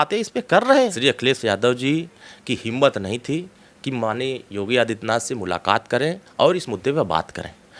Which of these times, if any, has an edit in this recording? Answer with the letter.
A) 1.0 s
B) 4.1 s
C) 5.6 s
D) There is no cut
A